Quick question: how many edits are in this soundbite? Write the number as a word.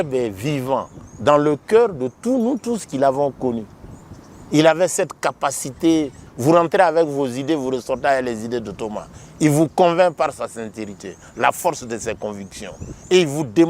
one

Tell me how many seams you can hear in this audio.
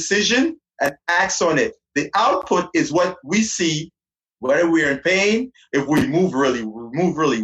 one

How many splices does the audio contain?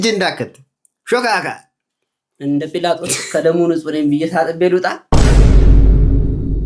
one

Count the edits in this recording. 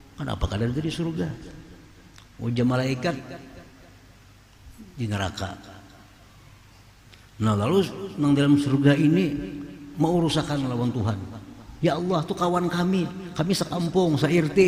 zero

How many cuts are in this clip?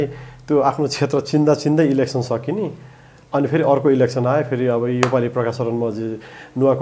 zero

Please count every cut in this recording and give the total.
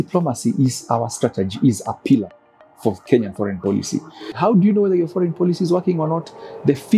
one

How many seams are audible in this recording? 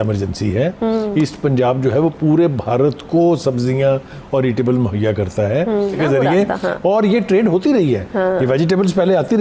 one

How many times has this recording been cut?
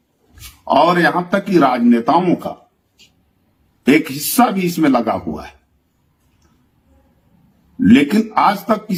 zero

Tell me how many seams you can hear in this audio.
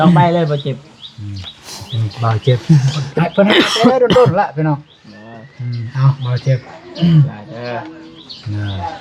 zero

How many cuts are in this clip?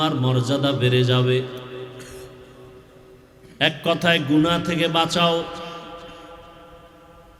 zero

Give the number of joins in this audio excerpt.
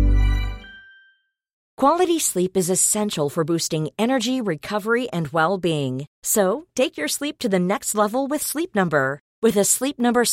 one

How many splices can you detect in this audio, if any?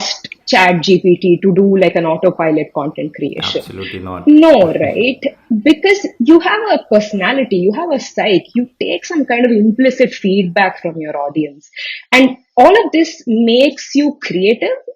zero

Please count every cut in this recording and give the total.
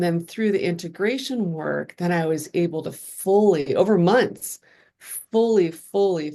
zero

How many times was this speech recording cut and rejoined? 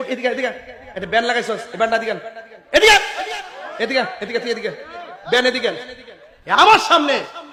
zero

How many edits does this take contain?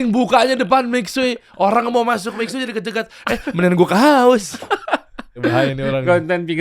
one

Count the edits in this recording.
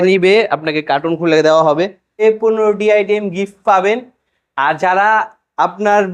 one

